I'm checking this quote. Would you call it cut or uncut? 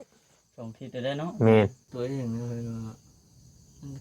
cut